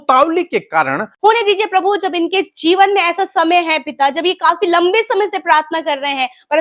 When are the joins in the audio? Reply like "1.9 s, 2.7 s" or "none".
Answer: 1.1 s